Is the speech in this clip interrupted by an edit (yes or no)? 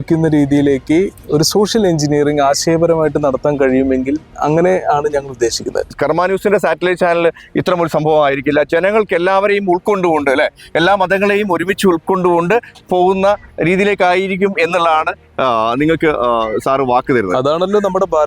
yes